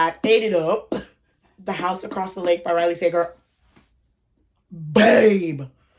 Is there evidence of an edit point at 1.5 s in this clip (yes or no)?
yes